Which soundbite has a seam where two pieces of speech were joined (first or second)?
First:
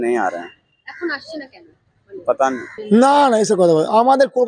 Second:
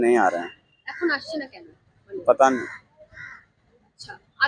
first